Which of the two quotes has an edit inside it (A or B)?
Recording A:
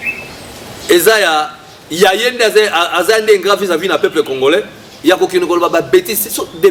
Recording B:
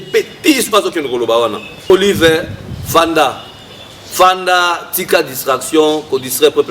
B